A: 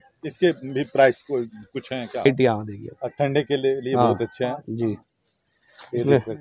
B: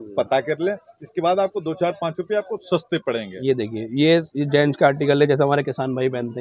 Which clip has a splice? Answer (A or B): A